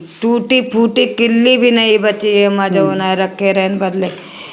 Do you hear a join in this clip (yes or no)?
no